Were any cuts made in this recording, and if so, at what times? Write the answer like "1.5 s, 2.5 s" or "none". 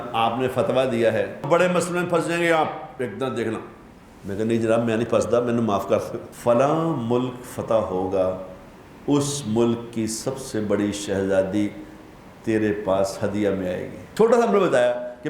1.4 s, 6.2 s, 14.0 s